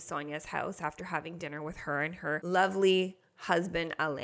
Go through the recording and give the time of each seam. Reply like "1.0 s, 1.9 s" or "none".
2.4 s